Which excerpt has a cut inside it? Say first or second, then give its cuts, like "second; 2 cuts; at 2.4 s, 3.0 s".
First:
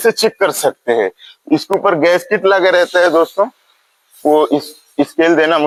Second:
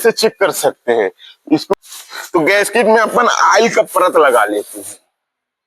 second; 1 cut; at 1.7 s